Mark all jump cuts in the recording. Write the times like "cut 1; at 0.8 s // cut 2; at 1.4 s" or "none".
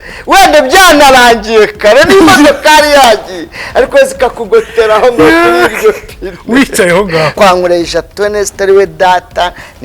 cut 1; at 7.3 s